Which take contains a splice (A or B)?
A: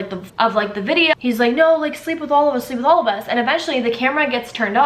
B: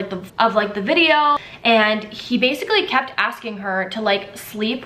B